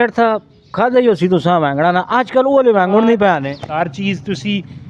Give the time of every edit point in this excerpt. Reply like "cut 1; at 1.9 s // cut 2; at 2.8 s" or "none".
cut 1; at 3.8 s